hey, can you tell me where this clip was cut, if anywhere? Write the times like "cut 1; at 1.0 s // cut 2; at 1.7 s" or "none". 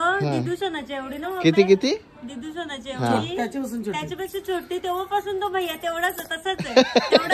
none